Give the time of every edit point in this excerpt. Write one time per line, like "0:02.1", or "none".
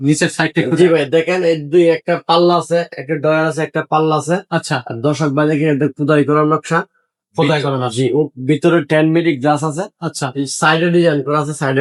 none